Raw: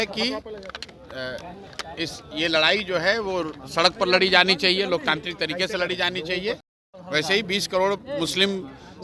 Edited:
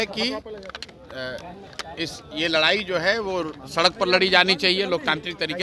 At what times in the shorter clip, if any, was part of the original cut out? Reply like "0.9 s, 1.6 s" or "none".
none